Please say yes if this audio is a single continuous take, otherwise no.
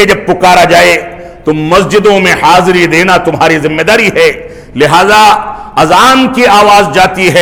yes